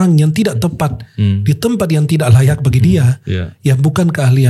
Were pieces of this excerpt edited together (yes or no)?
no